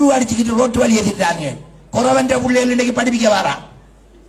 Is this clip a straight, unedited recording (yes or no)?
yes